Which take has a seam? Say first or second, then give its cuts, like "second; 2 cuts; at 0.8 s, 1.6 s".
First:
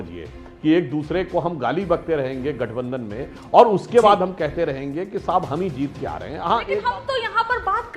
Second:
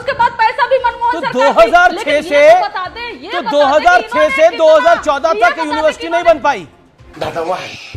first; 1 cut; at 6.8 s